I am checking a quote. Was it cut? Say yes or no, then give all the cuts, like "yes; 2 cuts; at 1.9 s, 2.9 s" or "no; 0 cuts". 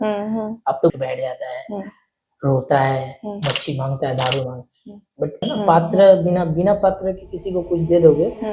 yes; 2 cuts; at 0.9 s, 5.5 s